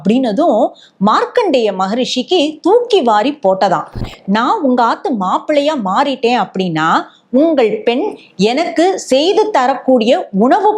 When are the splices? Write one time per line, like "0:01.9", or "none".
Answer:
0:04.1